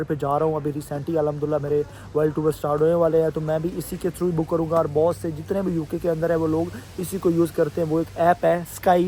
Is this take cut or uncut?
uncut